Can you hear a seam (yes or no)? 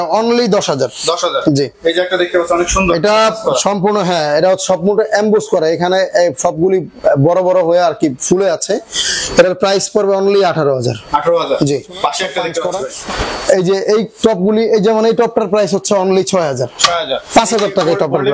yes